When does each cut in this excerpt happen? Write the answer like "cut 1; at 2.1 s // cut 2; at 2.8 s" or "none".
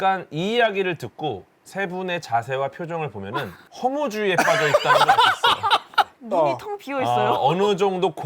cut 1; at 6.1 s